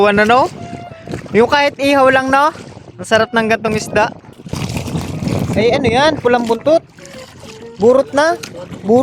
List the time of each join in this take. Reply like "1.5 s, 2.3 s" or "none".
4.6 s